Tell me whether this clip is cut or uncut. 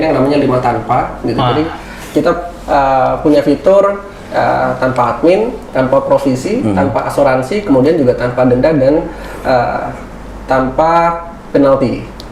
uncut